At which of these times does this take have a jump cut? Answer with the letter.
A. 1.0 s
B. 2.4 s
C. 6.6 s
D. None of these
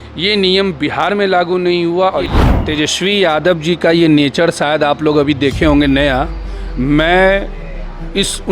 B